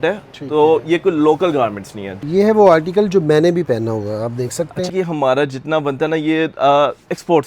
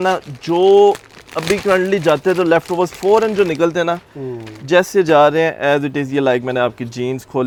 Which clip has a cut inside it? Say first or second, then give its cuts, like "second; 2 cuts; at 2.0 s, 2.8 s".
first; 2 cuts; at 2.2 s, 4.9 s